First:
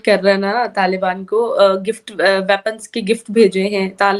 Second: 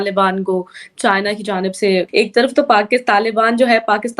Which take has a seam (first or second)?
second